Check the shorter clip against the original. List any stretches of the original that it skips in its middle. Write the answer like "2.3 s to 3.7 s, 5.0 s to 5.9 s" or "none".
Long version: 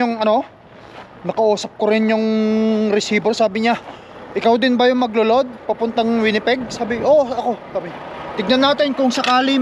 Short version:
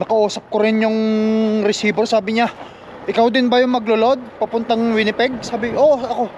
none